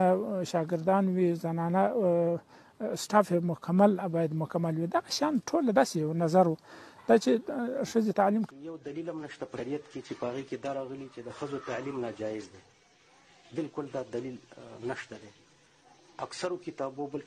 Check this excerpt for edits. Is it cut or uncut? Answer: cut